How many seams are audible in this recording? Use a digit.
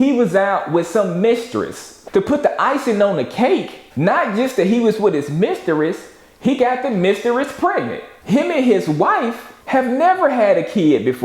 0